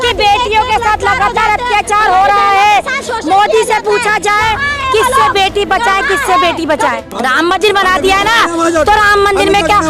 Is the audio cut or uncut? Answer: cut